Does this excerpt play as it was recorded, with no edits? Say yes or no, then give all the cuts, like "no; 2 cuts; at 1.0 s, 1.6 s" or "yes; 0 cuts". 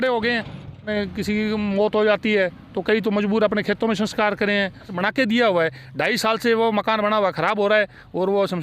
no; 2 cuts; at 0.9 s, 4.9 s